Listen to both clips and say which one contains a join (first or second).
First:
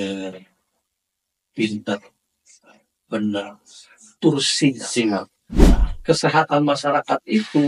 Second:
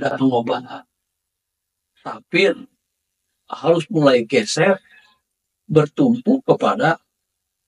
first